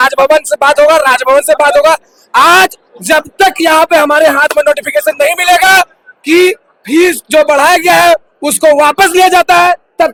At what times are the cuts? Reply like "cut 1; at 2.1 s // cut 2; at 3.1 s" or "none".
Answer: none